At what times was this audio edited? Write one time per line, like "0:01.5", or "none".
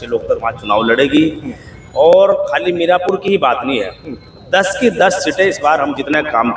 none